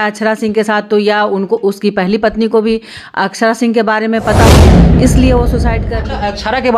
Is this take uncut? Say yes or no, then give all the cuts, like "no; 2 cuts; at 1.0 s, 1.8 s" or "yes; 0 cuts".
no; 1 cut; at 5.9 s